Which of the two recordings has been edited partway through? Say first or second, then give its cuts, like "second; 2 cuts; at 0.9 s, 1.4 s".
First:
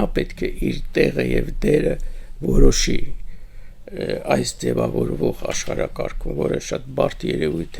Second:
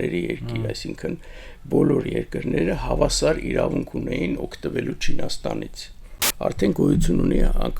second; 1 cut; at 6.2 s